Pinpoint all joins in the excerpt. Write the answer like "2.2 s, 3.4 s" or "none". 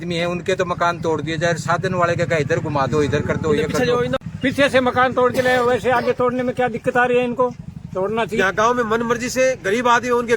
4.2 s, 8.4 s